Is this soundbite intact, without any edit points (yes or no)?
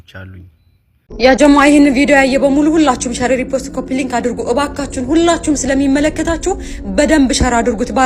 no